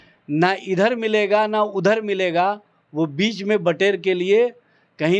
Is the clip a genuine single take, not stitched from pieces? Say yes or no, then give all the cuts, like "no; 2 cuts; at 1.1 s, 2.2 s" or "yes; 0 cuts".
yes; 0 cuts